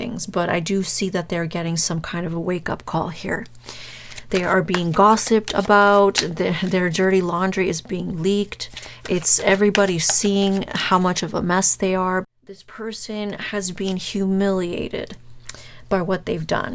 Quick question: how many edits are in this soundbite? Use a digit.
1